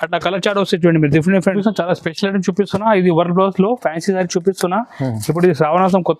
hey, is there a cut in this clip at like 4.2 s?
no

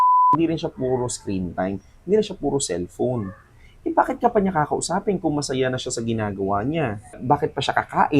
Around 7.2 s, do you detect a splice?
yes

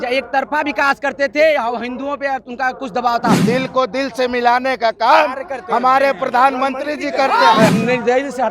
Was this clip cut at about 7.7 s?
yes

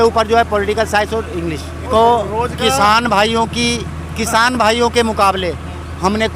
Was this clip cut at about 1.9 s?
yes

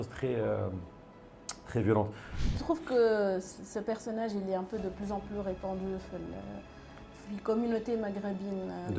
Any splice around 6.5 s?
no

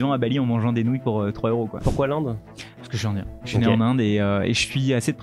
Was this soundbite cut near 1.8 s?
yes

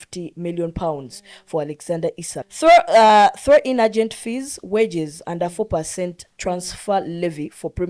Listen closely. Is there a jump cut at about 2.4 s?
yes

